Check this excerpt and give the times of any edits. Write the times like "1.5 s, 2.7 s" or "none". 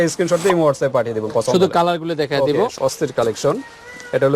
2.7 s